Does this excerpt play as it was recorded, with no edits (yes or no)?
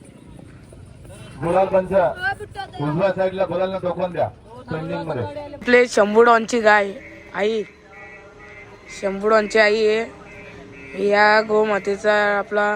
no